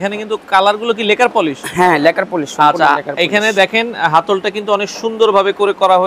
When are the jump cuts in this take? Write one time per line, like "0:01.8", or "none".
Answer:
none